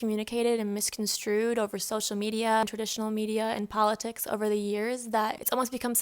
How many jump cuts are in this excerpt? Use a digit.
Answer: 1